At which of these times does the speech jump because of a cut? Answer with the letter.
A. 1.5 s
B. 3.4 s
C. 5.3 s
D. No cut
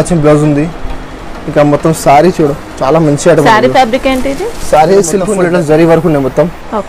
C